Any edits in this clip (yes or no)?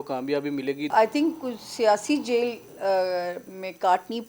yes